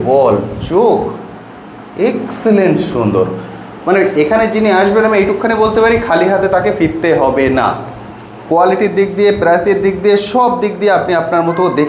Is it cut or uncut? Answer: uncut